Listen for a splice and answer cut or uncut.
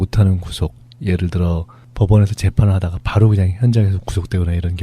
cut